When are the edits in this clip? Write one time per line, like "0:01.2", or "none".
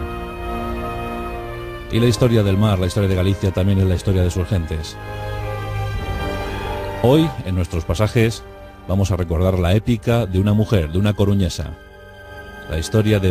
0:07.5